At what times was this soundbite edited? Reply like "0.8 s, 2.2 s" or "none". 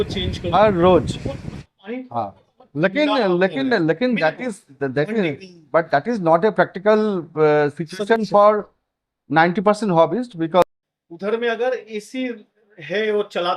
6.9 s, 10.6 s